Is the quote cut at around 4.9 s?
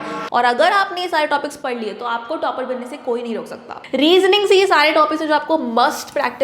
no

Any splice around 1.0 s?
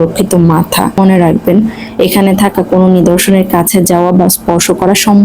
yes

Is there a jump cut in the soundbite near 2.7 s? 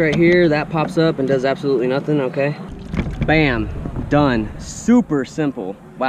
yes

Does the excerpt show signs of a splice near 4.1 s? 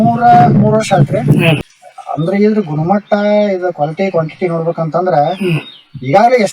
no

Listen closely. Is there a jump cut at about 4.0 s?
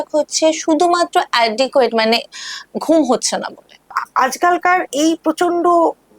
yes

